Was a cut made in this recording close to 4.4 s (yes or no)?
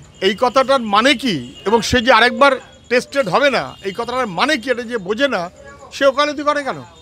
no